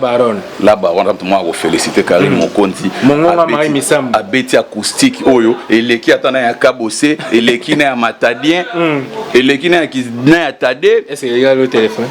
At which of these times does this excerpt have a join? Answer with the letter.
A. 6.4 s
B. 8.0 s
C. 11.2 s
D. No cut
D